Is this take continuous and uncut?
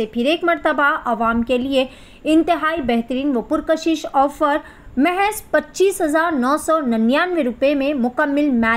yes; 0 cuts

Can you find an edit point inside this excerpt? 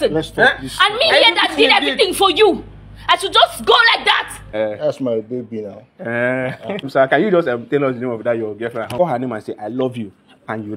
yes; 3 cuts; at 4.4 s, 6.9 s, 8.9 s

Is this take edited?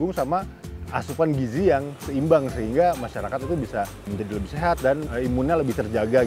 yes; 1 cut; at 4.0 s

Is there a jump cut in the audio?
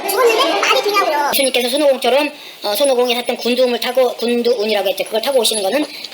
yes; 1 cut; at 1.3 s

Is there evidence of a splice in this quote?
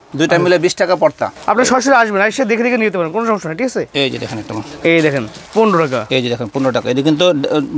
yes; 2 cuts; at 1.3 s, 5.3 s

